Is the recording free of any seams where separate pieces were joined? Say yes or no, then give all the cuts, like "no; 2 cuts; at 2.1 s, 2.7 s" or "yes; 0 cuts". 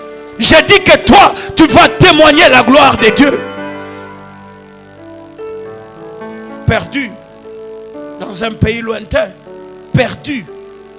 yes; 0 cuts